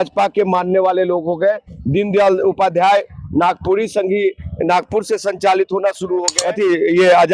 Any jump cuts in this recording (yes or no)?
yes